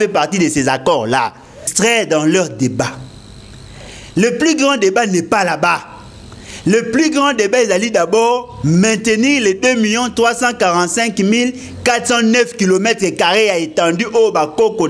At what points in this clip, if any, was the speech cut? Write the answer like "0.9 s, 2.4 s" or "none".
1.7 s

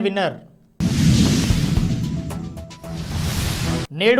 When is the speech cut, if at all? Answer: 1.4 s, 3.4 s

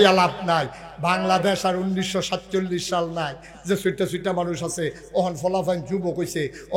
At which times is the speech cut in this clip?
none

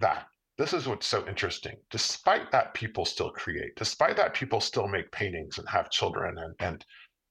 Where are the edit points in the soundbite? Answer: none

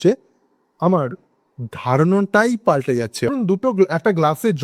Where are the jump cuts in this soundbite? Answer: 3.3 s

